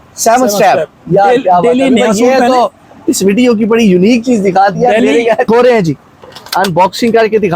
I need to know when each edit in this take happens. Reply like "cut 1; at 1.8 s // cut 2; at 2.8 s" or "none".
cut 1; at 5.5 s